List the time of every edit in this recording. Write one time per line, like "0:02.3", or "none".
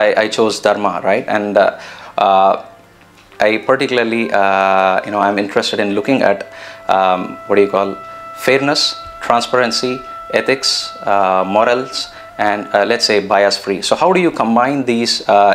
0:03.3